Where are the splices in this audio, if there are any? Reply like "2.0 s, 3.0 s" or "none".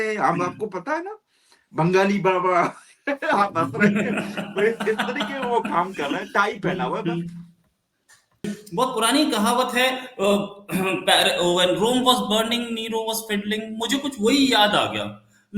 8.4 s